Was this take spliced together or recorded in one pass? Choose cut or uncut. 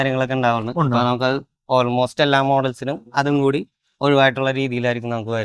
uncut